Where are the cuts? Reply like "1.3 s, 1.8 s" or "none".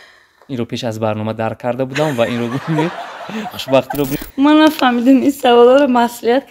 4.2 s